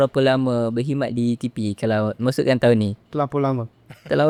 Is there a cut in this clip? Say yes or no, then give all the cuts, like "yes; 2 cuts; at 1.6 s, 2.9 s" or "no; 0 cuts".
no; 0 cuts